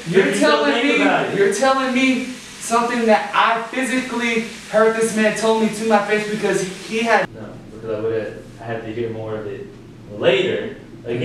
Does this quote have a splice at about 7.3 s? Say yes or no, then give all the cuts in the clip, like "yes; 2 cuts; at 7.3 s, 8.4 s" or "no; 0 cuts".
yes; 1 cut; at 7.3 s